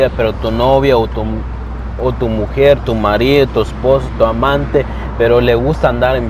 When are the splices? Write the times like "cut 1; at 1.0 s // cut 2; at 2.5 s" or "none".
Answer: none